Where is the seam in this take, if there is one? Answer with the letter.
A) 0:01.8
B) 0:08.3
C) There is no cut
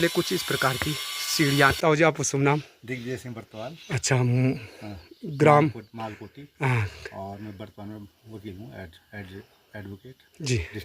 A